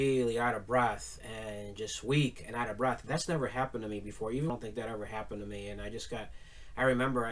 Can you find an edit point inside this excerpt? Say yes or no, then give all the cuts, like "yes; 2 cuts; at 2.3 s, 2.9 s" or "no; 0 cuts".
yes; 1 cut; at 4.5 s